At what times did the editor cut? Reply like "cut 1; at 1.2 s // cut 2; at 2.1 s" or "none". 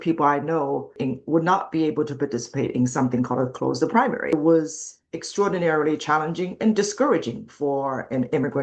cut 1; at 0.9 s // cut 2; at 4.3 s